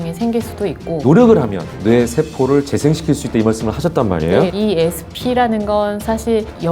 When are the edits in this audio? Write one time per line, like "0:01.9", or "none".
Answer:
0:01.0
0:04.5